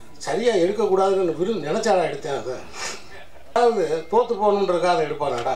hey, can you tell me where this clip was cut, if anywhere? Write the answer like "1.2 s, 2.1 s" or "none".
3.6 s